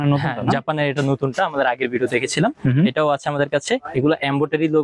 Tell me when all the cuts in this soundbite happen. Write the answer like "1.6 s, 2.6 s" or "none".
none